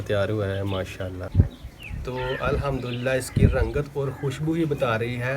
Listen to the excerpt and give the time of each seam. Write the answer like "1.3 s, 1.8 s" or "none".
1.2 s